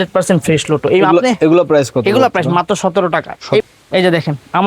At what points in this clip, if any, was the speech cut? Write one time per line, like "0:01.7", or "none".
0:03.6